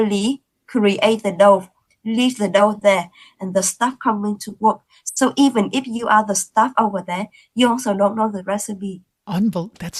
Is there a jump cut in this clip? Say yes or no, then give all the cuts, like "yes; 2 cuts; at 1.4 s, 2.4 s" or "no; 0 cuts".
no; 0 cuts